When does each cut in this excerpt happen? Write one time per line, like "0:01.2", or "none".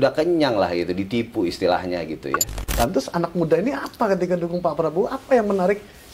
0:02.6